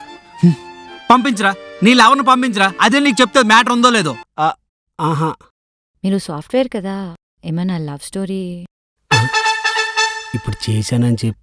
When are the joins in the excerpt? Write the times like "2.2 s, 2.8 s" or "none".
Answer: 4.2 s